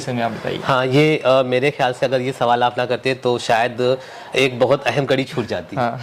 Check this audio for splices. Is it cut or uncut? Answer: uncut